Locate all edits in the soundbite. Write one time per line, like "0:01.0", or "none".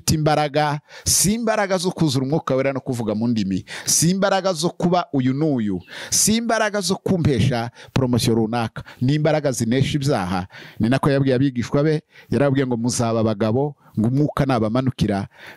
none